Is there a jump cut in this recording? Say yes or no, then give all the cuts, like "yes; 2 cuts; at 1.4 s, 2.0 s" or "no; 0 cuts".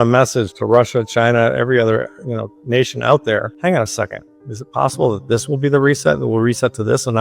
yes; 1 cut; at 3.5 s